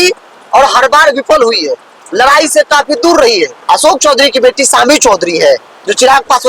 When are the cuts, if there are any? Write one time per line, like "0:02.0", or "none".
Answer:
0:03.6